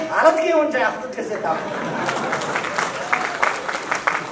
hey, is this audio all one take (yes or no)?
yes